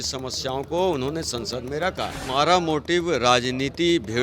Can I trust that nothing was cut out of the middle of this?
no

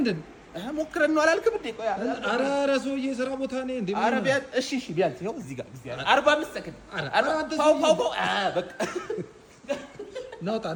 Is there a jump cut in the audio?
no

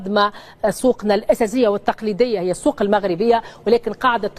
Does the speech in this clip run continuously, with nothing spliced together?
yes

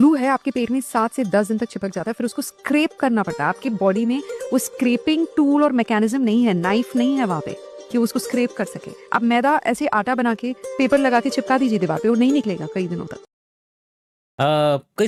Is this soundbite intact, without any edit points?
yes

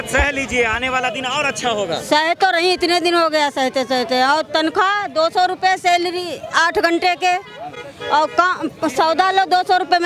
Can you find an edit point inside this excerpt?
no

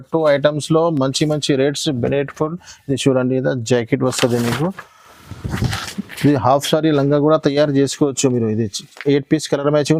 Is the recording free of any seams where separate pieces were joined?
yes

